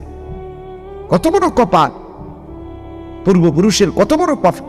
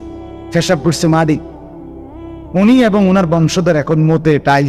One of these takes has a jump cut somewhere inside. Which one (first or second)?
first